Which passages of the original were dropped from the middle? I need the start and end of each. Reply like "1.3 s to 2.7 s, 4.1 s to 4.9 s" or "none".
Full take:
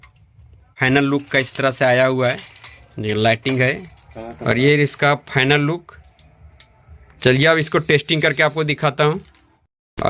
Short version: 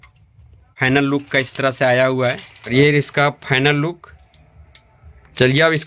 2.7 s to 4.5 s